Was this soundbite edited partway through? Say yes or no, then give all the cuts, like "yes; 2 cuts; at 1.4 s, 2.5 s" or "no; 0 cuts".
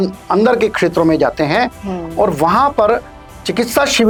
no; 0 cuts